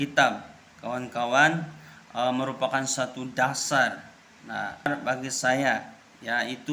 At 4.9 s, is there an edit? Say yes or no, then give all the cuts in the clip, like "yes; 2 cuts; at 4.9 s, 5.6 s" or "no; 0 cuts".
yes; 1 cut; at 4.9 s